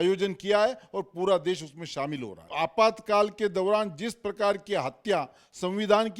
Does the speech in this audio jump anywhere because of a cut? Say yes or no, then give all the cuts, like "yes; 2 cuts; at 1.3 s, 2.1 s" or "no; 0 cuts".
yes; 1 cut; at 2.5 s